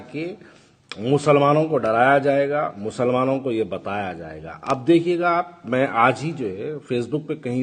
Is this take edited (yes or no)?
no